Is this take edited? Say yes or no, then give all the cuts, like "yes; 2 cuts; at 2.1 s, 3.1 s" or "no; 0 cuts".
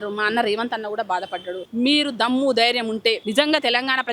yes; 1 cut; at 1.6 s